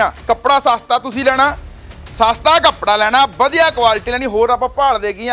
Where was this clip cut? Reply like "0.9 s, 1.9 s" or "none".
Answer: none